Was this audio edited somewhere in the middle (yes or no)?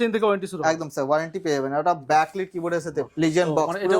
yes